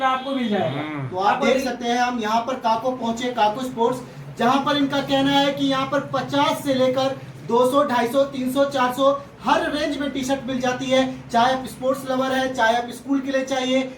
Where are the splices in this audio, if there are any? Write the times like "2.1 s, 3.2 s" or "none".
none